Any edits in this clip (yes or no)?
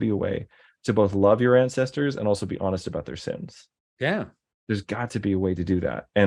no